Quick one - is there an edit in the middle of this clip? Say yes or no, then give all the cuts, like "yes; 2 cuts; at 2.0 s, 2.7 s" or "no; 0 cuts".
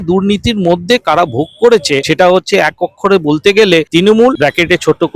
yes; 2 cuts; at 2.1 s, 4.1 s